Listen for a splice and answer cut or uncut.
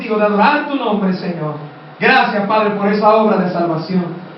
uncut